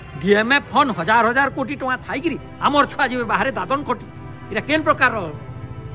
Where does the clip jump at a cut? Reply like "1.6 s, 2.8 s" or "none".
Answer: none